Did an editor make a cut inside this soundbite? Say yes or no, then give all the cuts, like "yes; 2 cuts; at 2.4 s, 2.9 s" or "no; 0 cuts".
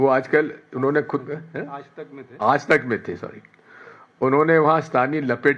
no; 0 cuts